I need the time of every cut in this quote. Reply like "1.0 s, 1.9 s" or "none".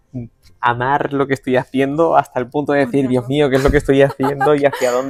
none